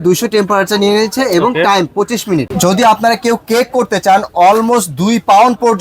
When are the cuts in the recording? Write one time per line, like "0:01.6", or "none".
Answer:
0:02.5